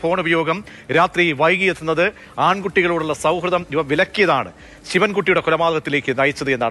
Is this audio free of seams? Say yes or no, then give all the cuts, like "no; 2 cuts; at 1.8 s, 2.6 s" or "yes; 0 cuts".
yes; 0 cuts